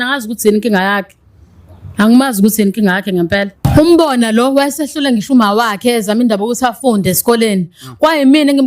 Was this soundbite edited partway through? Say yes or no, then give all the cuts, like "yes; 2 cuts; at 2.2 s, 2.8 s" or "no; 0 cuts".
no; 0 cuts